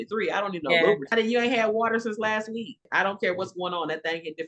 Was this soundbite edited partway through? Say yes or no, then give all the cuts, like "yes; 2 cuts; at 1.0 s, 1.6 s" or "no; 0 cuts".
yes; 2 cuts; at 1.1 s, 2.8 s